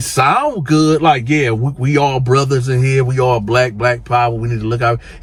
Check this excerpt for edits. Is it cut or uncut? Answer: uncut